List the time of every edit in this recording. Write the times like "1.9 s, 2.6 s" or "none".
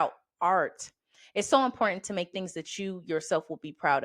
none